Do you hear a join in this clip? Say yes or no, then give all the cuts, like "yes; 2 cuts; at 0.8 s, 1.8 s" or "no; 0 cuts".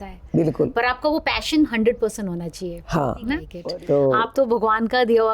yes; 1 cut; at 3.4 s